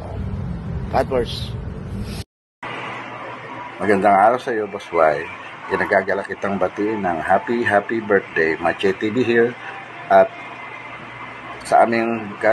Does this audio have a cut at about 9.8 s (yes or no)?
no